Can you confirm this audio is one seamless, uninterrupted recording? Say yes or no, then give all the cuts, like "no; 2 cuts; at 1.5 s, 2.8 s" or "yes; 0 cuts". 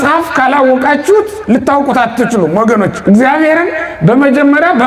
yes; 0 cuts